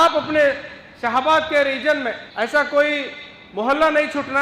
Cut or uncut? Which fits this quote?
cut